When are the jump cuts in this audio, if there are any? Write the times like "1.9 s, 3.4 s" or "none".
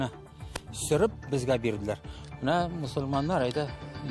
none